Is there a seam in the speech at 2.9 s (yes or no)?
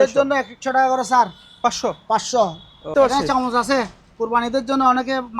yes